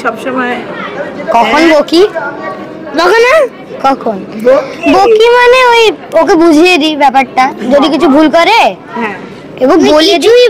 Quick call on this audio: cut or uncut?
uncut